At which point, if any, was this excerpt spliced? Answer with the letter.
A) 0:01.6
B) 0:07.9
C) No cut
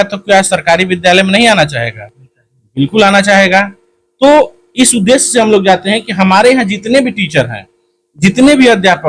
C